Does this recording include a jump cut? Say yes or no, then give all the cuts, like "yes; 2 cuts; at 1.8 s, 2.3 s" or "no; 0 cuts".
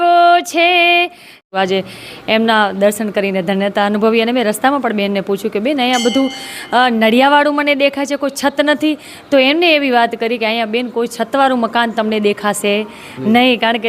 yes; 1 cut; at 1.5 s